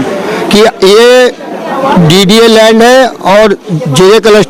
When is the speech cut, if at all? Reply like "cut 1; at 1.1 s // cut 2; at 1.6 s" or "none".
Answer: none